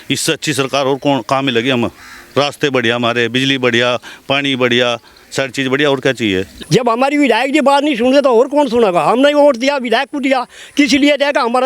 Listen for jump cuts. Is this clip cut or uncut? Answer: cut